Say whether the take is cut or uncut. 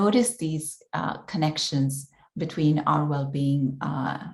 uncut